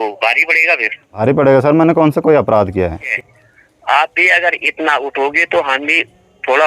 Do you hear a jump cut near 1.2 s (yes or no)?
yes